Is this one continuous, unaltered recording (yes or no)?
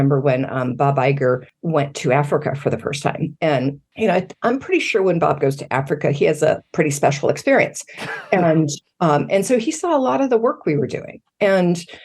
no